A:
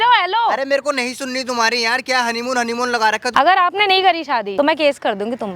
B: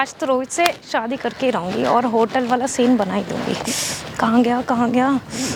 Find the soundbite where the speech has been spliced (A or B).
A